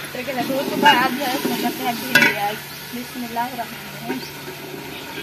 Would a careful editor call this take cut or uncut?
uncut